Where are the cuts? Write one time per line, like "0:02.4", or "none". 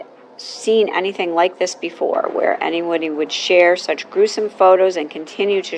none